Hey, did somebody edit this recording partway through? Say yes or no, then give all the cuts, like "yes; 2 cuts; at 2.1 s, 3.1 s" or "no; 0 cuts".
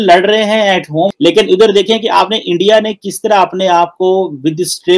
yes; 1 cut; at 1.1 s